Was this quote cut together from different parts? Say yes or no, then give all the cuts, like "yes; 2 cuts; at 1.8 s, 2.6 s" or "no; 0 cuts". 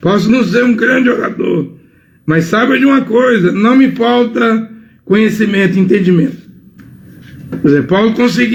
no; 0 cuts